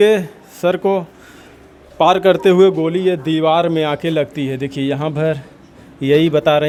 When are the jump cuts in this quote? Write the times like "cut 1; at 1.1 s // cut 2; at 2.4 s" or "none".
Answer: none

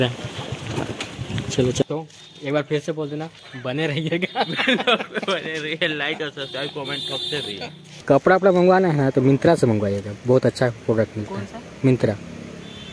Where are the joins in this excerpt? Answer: cut 1; at 1.8 s // cut 2; at 8.0 s

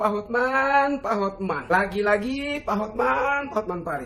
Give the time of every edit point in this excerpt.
none

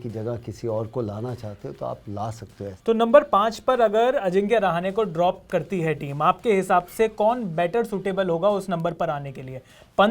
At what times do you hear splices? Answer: cut 1; at 2.7 s

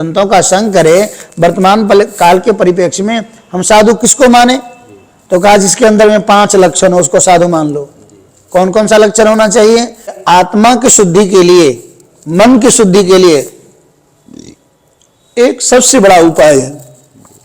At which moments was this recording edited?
cut 1; at 10.2 s

